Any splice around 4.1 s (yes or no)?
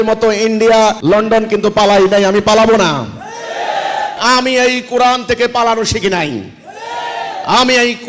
yes